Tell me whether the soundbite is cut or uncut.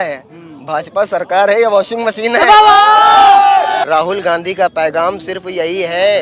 cut